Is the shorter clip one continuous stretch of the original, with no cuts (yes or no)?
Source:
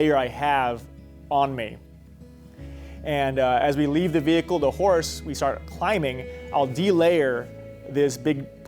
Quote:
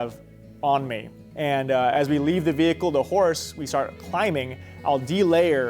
no